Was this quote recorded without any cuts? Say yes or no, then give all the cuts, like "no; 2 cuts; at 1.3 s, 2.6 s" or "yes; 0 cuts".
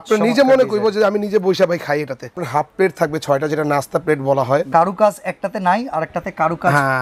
no; 2 cuts; at 2.4 s, 4.7 s